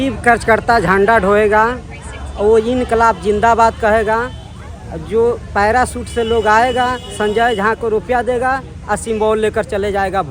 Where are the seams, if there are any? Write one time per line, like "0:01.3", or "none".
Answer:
none